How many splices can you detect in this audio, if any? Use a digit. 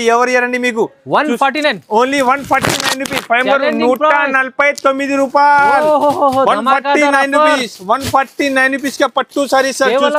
0